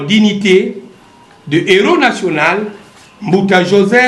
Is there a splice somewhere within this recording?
no; 0 cuts

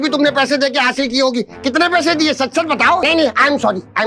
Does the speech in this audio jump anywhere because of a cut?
yes; 1 cut; at 3.0 s

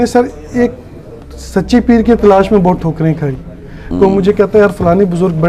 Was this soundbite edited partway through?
no; 0 cuts

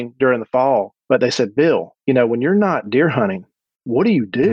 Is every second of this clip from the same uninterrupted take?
no; 2 cuts; at 1.0 s, 1.9 s

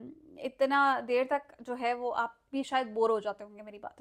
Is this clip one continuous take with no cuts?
yes; 0 cuts

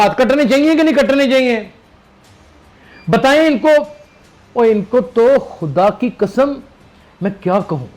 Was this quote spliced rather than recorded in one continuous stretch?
no; 0 cuts

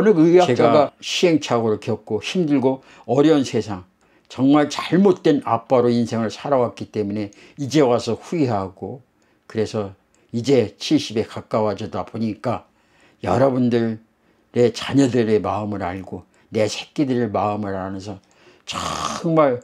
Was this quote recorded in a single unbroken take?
no; 1 cut; at 1.0 s

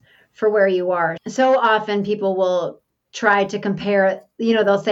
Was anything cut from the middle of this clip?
no; 0 cuts

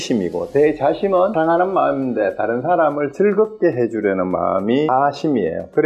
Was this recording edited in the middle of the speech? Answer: yes; 2 cuts; at 1.3 s, 4.9 s

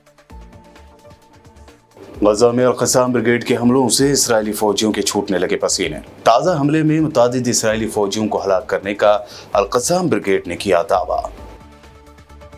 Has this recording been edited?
no; 0 cuts

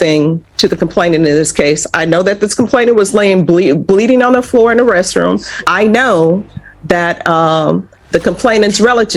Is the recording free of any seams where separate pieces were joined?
no; 1 cut; at 5.5 s

